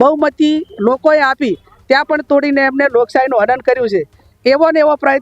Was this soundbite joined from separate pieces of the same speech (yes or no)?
no